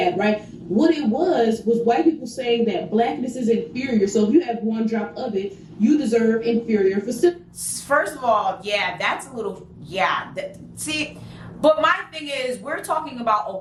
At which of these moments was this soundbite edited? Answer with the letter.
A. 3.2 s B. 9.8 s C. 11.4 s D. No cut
D